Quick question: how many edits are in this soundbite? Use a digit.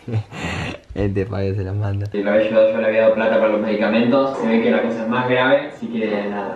1